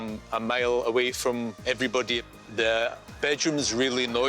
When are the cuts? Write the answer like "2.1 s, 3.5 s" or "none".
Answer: 2.2 s